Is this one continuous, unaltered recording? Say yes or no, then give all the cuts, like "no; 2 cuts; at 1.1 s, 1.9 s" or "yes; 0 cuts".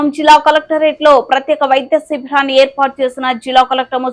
yes; 0 cuts